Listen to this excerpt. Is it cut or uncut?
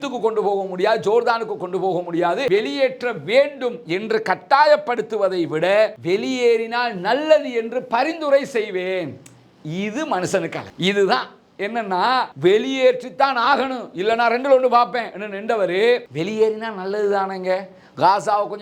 cut